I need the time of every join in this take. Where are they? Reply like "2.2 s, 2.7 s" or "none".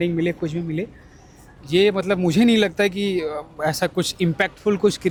none

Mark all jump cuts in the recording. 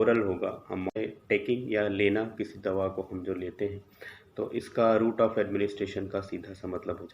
0.9 s

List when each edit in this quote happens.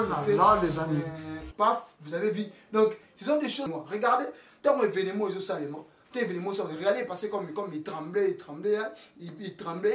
3.7 s

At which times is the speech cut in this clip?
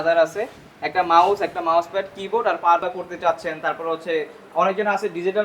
2.8 s

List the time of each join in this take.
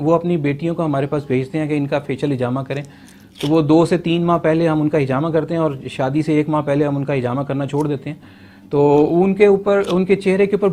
none

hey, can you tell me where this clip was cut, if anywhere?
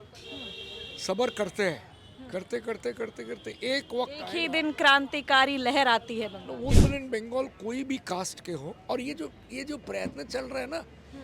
6.7 s

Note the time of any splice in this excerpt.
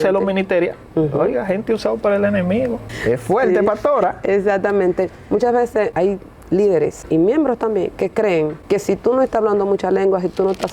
2.9 s, 5.9 s, 7.0 s, 8.6 s

